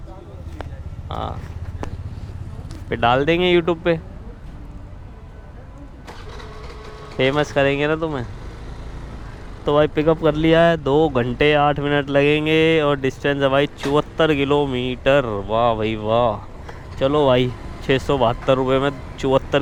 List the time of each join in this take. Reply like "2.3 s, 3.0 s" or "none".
none